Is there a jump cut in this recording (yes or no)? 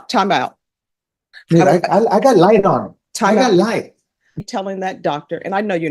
yes